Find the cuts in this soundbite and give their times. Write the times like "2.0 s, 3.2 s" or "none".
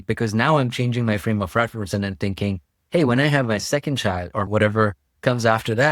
4.5 s